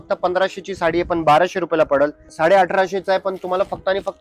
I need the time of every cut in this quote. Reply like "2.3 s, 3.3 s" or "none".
2.2 s